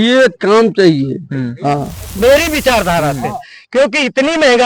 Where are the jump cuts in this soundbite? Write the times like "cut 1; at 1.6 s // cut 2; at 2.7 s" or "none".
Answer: cut 1; at 2.1 s